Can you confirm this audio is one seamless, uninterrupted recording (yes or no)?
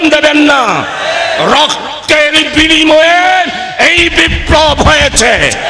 yes